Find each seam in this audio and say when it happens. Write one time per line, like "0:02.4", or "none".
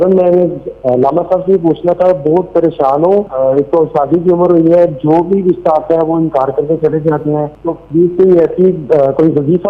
0:03.3
0:07.5